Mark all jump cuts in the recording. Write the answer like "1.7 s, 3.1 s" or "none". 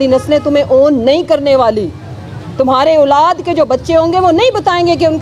none